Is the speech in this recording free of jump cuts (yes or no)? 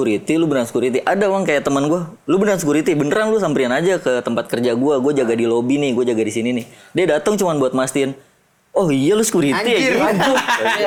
yes